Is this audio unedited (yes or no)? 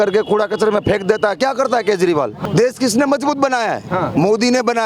no